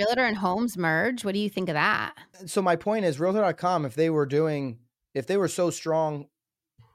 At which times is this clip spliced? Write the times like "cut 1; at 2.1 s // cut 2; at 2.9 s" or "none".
cut 1; at 2.3 s